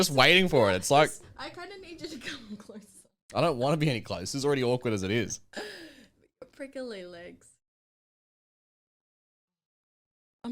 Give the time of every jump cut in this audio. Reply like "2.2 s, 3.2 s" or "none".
none